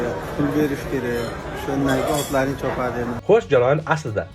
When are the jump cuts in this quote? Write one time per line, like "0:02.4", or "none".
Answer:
none

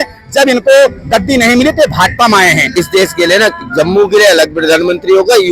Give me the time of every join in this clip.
0:02.7

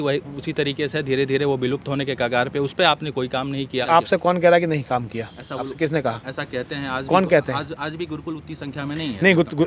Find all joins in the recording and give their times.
0:03.8

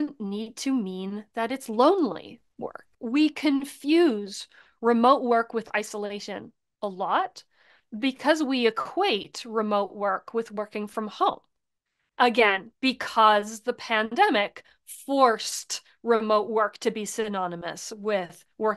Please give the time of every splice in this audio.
0:02.9

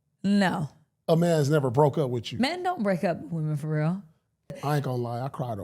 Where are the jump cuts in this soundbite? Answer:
0:04.6

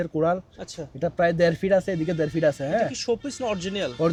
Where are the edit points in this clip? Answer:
none

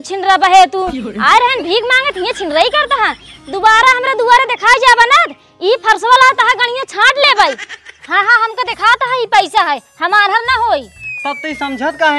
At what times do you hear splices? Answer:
0:07.9

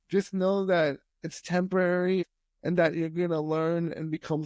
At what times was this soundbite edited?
0:02.3

